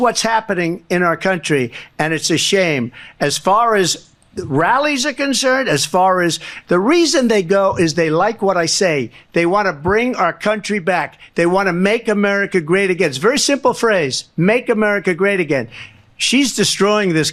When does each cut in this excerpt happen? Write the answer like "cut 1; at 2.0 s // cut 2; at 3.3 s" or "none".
none